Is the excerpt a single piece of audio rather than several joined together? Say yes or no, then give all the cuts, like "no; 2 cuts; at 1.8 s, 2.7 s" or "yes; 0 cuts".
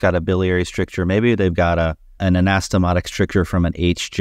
no; 1 cut; at 2.0 s